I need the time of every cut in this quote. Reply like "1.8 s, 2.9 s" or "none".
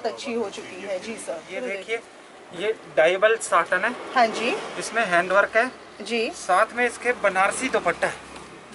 1.5 s